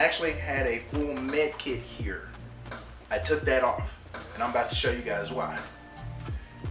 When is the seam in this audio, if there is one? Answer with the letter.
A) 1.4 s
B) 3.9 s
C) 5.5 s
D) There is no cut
C